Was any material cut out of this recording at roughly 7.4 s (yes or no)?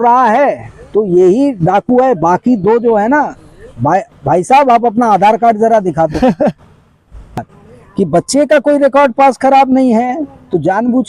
yes